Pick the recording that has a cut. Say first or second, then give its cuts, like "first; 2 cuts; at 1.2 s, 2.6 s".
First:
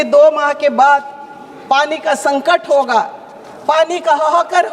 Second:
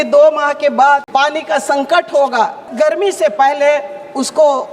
second; 2 cuts; at 1.1 s, 2.6 s